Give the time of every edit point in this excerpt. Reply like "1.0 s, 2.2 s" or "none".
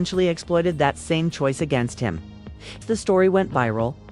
1.3 s, 2.8 s